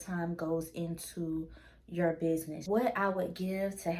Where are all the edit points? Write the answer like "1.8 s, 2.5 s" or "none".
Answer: 2.6 s